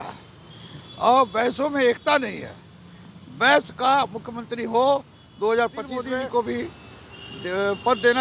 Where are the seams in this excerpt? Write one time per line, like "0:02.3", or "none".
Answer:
0:06.0